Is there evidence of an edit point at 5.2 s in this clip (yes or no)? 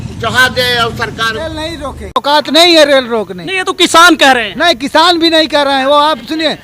no